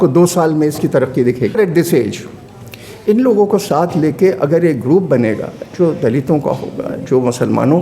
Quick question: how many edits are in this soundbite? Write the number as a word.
one